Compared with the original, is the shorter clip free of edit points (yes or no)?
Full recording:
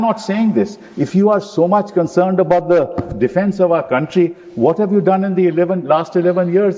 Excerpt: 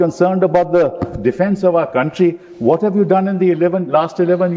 yes